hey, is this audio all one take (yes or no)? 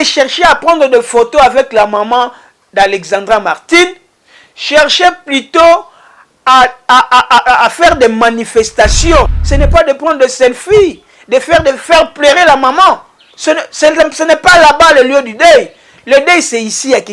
no